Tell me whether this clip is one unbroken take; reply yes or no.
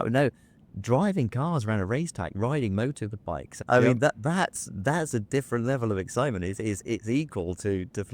no